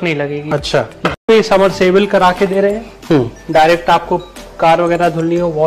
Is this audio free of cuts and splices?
no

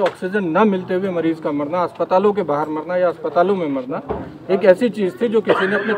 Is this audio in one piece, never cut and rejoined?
yes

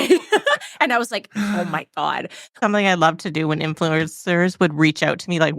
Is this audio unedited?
no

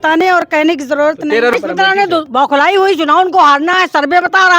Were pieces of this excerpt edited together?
yes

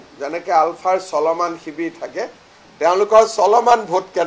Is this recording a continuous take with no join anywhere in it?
yes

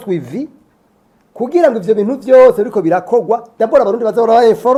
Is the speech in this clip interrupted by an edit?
no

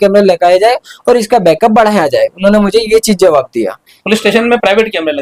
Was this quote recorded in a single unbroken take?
yes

